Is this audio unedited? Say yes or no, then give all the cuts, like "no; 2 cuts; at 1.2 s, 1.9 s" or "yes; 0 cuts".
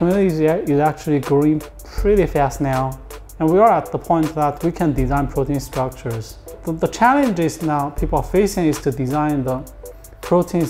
no; 1 cut; at 6.5 s